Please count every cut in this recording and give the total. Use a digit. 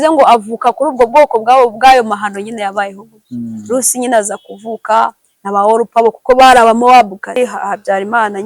1